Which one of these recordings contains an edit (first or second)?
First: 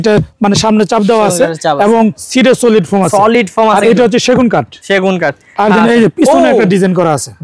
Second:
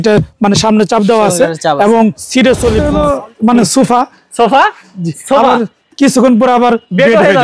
second